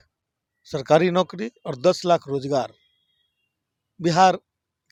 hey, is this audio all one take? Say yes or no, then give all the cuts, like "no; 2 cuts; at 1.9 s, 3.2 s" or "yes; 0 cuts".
yes; 0 cuts